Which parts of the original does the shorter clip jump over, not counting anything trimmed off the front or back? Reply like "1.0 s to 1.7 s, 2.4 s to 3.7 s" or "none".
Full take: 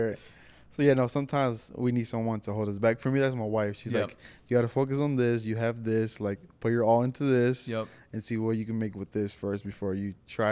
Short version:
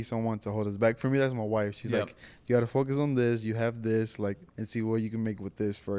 6.5 s to 8.0 s